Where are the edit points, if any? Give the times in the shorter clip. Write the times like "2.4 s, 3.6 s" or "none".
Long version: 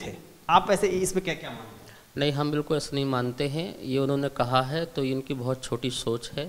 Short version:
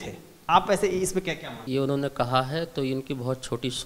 1.6 s

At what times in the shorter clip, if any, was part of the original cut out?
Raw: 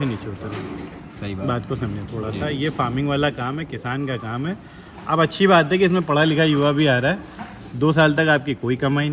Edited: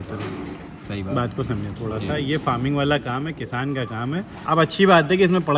4.3 s

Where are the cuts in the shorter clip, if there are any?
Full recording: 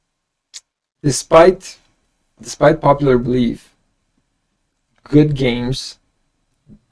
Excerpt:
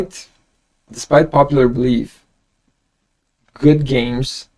none

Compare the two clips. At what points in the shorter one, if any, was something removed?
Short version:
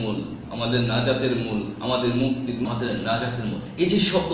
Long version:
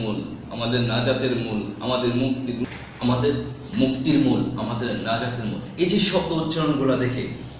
2.7 s

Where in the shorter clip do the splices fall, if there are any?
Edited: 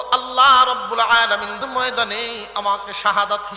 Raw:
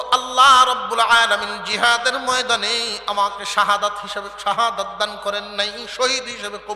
1.7 s

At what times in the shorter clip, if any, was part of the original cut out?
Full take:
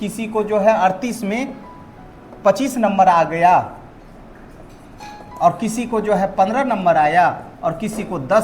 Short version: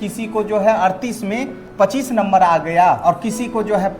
1.6 s, 3.0 s

